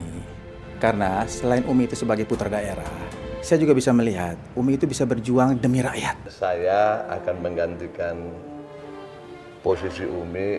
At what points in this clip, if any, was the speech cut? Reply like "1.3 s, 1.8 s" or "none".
6.2 s